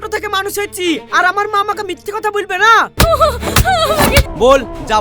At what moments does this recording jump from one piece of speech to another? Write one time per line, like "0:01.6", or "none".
0:02.9
0:04.3